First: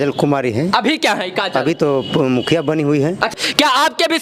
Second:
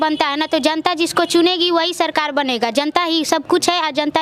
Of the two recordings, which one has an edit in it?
first; 1 cut; at 3.3 s

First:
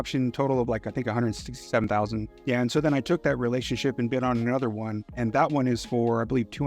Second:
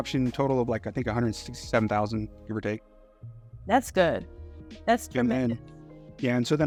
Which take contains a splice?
first; 2 cuts; at 1.8 s, 5.0 s

